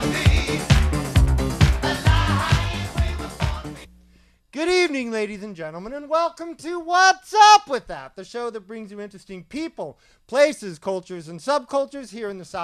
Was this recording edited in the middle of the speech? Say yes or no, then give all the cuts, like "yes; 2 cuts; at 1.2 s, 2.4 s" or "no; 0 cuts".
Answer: no; 0 cuts